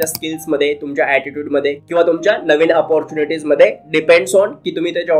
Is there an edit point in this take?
no; 0 cuts

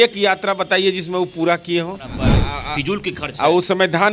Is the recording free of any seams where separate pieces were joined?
no; 1 cut; at 2.3 s

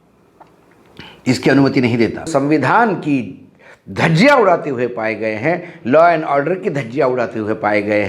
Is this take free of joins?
no; 1 cut; at 2.3 s

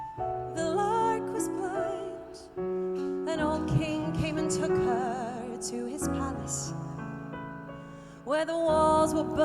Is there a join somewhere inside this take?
yes; 1 cut; at 3.0 s

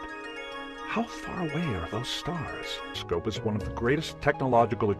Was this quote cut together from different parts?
no; 0 cuts

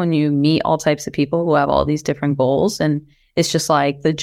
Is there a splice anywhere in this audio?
no; 0 cuts

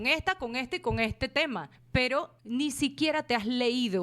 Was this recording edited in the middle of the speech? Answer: yes; 1 cut; at 2.1 s

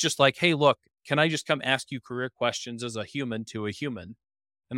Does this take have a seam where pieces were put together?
no; 0 cuts

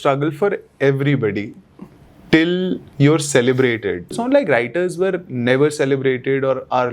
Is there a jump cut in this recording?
yes; 1 cut; at 4.2 s

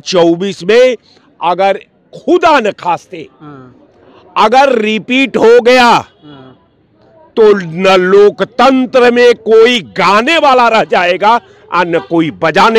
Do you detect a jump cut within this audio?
no; 0 cuts

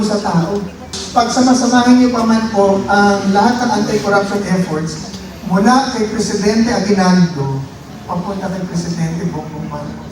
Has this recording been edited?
yes; 1 cut; at 0.9 s

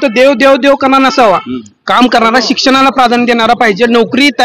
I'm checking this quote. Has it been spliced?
no; 0 cuts

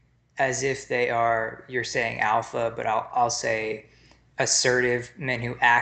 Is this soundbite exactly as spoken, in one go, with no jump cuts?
yes; 0 cuts

